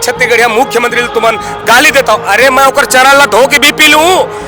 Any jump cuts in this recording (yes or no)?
no